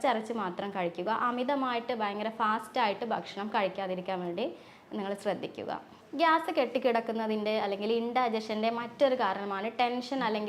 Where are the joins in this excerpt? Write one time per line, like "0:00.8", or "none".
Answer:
none